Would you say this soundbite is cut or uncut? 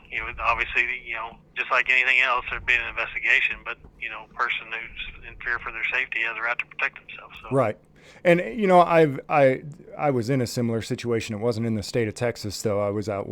uncut